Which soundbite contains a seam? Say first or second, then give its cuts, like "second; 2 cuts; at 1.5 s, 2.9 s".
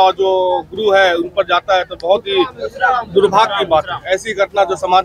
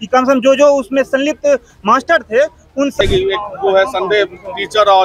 second; 1 cut; at 3.0 s